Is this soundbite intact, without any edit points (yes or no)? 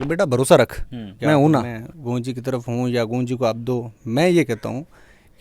no